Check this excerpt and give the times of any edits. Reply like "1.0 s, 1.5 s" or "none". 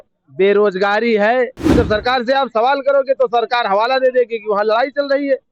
1.6 s